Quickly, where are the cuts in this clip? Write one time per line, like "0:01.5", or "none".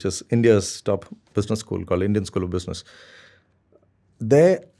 none